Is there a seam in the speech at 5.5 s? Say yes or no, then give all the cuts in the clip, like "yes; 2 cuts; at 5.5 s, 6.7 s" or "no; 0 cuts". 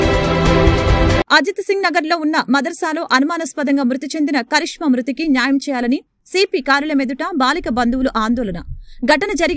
no; 1 cut; at 1.2 s